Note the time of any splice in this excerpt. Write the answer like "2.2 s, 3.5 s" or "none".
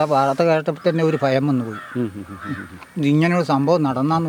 none